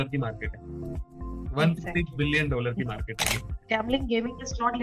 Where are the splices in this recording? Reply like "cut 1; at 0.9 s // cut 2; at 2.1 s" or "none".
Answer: cut 1; at 3.5 s